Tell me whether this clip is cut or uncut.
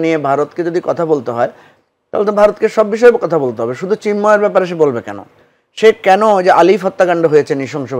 uncut